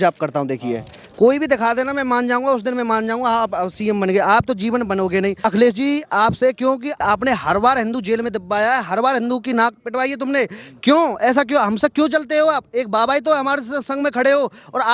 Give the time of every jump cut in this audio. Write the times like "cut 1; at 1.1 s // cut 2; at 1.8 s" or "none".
cut 1; at 5.4 s // cut 2; at 7.0 s